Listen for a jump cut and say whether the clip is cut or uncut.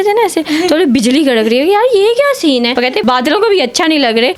uncut